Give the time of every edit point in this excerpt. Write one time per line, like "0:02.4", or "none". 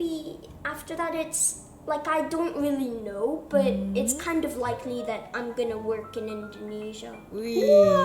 none